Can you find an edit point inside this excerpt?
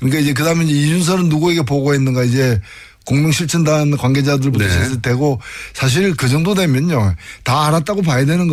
no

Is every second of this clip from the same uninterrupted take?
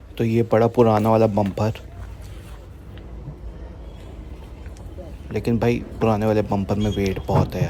yes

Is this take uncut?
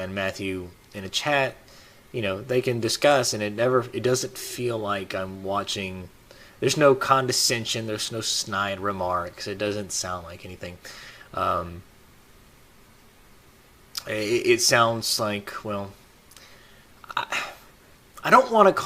no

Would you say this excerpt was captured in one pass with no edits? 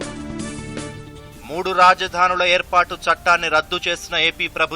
no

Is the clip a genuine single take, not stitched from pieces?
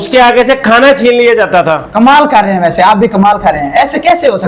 no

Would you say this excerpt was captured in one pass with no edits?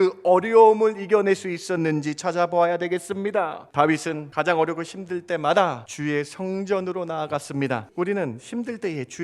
no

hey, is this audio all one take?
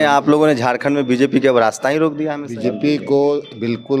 no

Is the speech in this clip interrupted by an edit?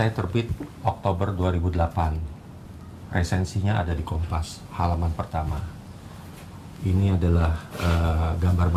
no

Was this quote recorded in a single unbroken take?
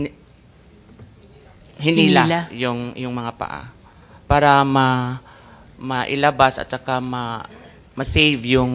yes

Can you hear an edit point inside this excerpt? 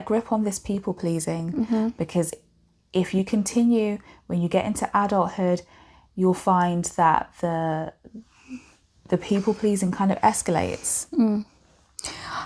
no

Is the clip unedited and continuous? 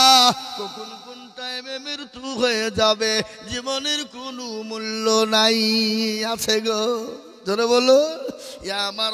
yes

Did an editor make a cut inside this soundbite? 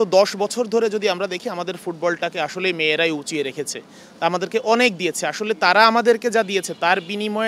no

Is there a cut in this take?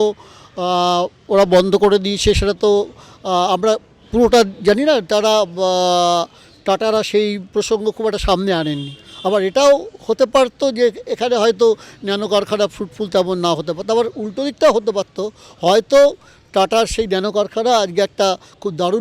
no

